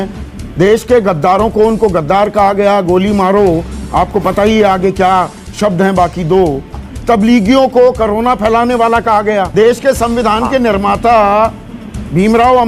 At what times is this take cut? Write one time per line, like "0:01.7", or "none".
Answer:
0:06.8
0:09.5